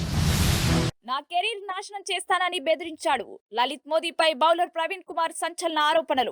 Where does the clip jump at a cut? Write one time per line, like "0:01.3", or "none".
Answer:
0:01.0

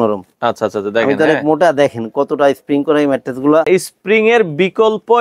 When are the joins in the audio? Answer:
0:03.7

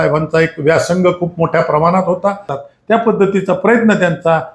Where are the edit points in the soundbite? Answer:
0:02.5

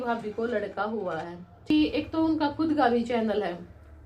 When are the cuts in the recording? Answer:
0:01.7

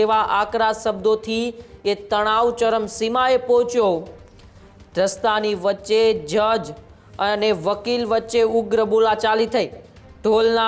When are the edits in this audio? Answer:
none

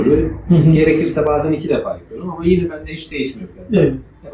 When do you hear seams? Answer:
none

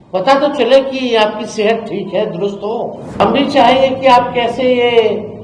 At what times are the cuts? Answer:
0:03.2

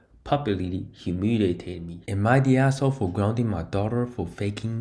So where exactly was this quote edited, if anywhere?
0:02.0

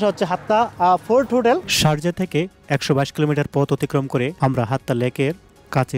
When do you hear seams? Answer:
0:01.7
0:04.3

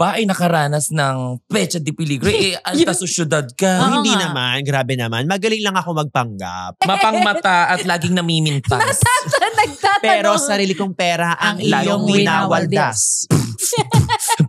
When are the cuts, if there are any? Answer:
0:06.8

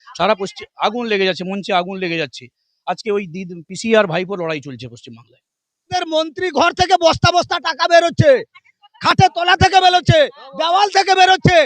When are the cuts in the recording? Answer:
0:06.0

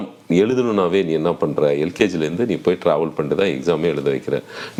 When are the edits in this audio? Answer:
none

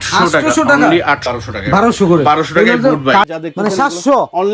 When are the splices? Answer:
0:01.3
0:03.3

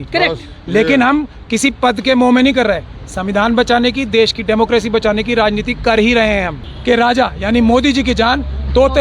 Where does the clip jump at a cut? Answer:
0:06.7

